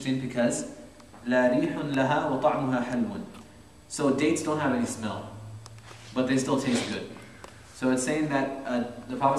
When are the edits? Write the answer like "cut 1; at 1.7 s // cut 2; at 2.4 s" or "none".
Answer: cut 1; at 3.9 s